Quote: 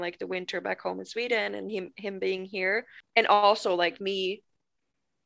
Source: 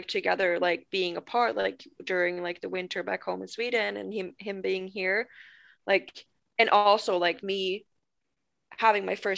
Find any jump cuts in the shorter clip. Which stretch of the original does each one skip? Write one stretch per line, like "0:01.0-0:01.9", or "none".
0:05.4-0:06.4